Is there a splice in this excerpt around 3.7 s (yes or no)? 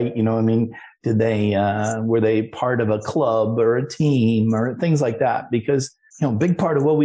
no